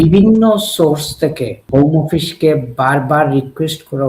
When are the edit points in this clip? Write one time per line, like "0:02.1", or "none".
0:01.6